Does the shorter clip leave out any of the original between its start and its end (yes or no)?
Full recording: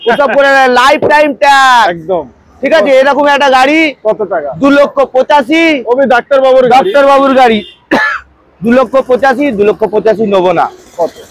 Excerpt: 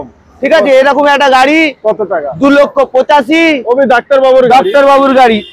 no